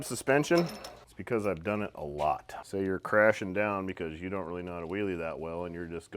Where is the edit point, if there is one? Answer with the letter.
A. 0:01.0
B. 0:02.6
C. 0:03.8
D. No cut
B